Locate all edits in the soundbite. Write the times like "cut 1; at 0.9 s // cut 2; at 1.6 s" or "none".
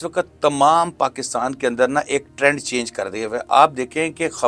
none